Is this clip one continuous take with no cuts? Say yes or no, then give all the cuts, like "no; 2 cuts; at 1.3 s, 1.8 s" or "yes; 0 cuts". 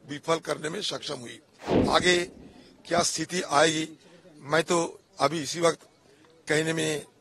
no; 1 cut; at 1.7 s